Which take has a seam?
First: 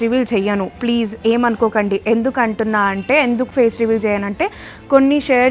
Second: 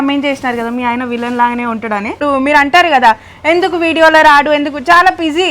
second; 1 cut; at 2.2 s

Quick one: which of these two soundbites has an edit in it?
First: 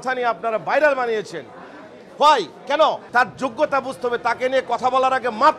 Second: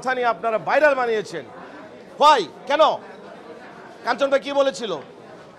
first; 1 cut; at 3.0 s

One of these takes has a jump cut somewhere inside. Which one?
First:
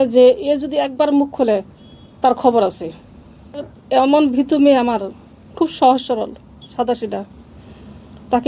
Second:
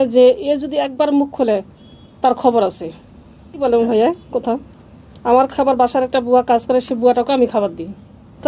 first; 1 cut; at 3.6 s

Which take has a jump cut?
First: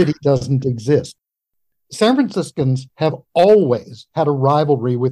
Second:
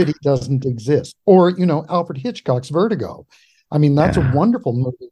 first; 1 cut; at 1.1 s

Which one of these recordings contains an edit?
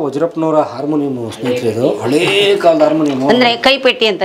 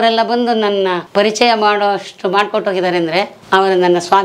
second; 2 cuts; at 1.0 s, 3.4 s

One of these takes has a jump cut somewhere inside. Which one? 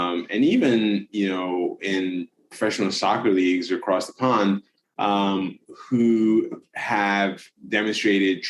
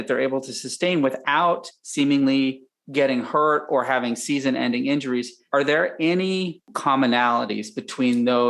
second; 2 cuts; at 5.4 s, 6.7 s

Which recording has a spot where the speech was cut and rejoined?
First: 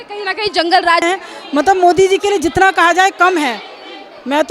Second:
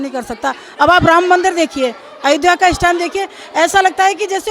first; 1 cut; at 1.0 s

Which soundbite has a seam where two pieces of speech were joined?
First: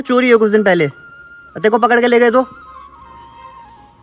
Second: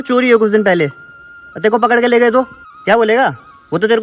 second; 1 cut; at 2.6 s

